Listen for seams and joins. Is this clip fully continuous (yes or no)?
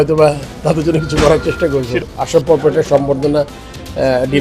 no